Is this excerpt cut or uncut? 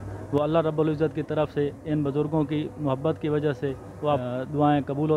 cut